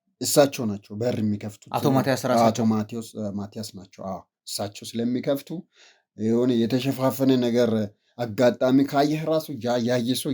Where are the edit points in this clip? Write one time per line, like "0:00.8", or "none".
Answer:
none